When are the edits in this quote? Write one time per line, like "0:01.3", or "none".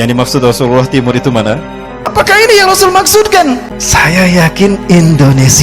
0:02.1
0:03.3